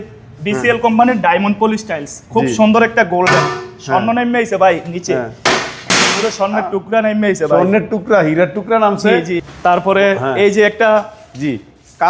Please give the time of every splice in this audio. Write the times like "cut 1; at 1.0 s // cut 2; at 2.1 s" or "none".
none